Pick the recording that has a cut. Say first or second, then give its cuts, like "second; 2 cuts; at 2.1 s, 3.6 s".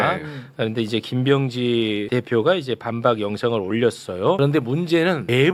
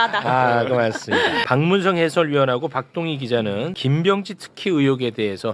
second; 1 cut; at 1.4 s